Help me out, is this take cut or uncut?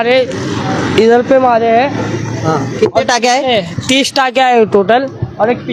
uncut